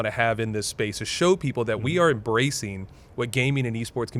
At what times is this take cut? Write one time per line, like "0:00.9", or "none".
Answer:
none